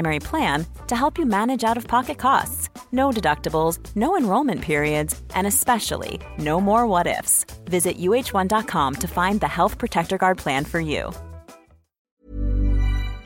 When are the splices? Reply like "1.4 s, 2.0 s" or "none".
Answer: 12.2 s